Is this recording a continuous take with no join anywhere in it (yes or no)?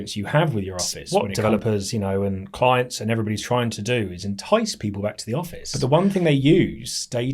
no